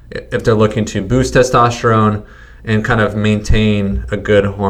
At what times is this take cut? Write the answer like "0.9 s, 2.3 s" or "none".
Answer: none

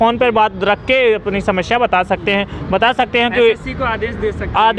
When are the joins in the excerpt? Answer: none

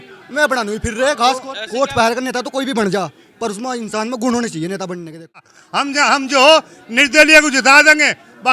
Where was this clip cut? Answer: 1.6 s, 5.6 s

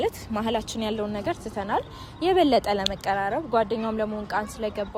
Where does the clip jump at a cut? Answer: none

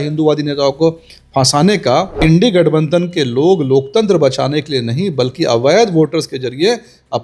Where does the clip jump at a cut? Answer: 2.2 s

